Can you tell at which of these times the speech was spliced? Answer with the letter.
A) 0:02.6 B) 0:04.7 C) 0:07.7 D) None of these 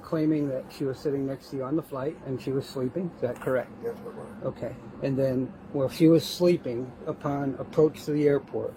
D